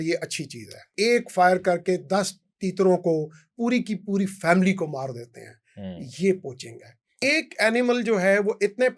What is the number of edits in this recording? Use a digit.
2